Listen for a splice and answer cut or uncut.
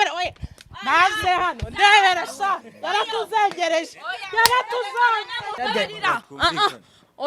cut